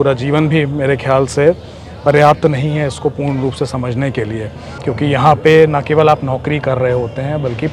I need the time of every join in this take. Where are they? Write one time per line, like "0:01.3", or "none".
0:04.6